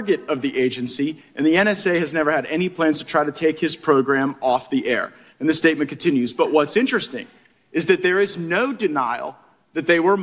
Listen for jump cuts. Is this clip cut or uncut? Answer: uncut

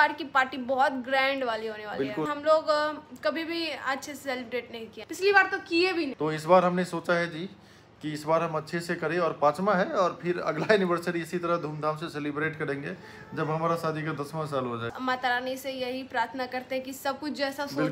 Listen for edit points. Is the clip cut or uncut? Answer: cut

